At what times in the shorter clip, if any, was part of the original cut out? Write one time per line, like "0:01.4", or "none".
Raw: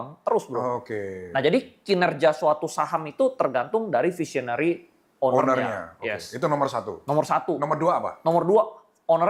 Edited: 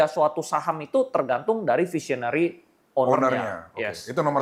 none